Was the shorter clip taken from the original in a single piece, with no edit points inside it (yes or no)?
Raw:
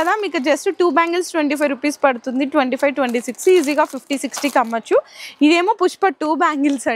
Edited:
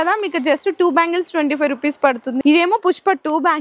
no